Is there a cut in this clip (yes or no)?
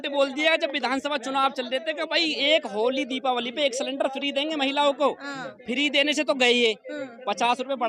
no